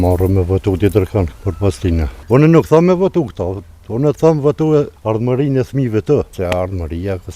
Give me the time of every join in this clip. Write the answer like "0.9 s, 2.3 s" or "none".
2.2 s, 5.0 s, 6.3 s